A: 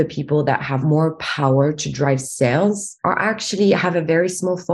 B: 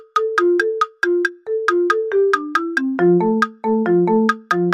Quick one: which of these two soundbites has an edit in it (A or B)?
A